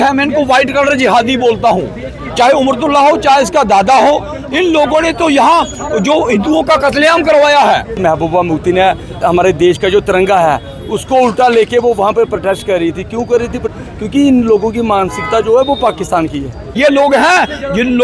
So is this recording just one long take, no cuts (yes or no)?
no